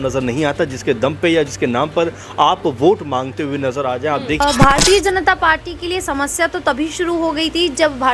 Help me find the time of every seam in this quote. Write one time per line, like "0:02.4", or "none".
0:04.4